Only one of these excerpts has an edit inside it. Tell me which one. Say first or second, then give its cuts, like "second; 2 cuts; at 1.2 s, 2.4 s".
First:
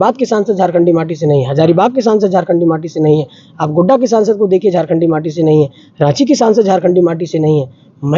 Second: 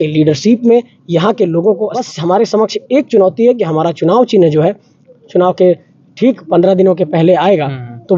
second; 1 cut; at 2.0 s